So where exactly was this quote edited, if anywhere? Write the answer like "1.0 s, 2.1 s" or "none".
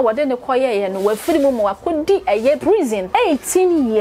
2.7 s